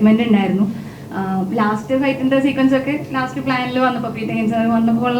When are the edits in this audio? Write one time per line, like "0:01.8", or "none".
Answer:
none